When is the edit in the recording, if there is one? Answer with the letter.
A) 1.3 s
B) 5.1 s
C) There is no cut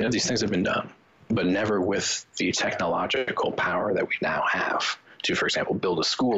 A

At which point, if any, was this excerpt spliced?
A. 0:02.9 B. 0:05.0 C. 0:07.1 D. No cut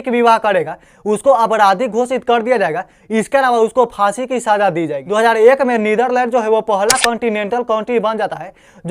B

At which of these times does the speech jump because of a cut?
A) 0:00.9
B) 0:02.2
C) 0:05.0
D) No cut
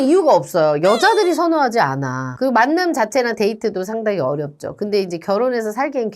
B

